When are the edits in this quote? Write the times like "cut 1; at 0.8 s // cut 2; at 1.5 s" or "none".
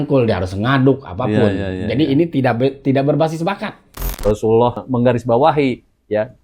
cut 1; at 4.0 s // cut 2; at 4.8 s